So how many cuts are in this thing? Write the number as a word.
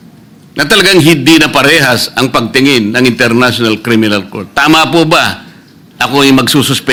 zero